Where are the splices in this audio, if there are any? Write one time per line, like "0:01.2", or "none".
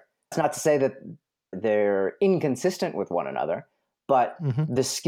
0:01.5